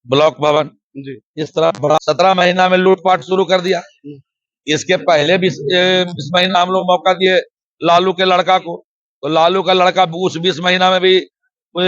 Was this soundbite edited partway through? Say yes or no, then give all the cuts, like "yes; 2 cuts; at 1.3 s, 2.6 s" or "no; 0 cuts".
yes; 1 cut; at 2.0 s